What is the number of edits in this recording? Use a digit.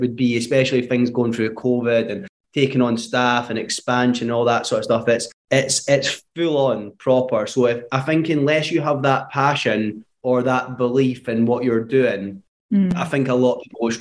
0